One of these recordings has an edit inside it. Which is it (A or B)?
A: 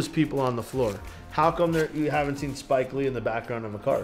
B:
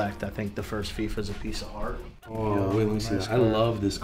B